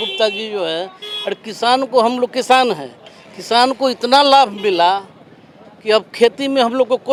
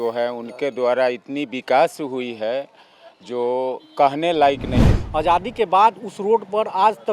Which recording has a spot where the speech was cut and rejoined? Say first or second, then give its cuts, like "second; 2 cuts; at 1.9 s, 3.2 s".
second; 1 cut; at 4.7 s